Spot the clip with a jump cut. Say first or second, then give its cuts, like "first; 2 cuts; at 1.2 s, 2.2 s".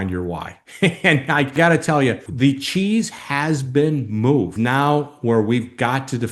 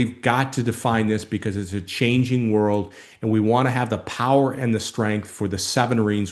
first; 2 cuts; at 2.3 s, 4.5 s